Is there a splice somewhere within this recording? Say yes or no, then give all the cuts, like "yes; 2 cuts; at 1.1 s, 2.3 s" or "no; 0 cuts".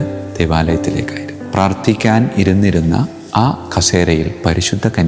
yes; 1 cut; at 1.4 s